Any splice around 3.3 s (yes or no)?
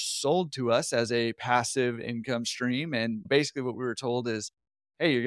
yes